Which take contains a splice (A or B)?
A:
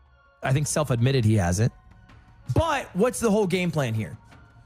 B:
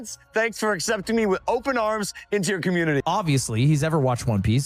B